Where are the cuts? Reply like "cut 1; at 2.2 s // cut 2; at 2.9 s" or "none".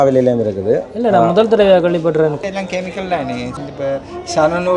cut 1; at 2.4 s // cut 2; at 3.5 s